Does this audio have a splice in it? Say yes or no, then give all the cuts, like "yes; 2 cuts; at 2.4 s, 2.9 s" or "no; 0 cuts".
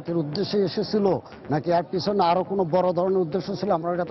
no; 0 cuts